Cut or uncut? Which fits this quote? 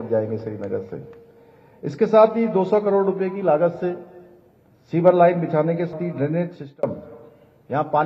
cut